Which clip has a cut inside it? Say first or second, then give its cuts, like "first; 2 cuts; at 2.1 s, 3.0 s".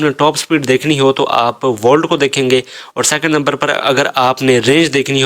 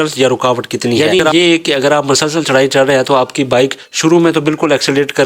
second; 1 cut; at 1.0 s